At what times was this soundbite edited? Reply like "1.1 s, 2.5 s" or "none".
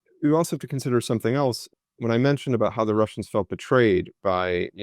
1.7 s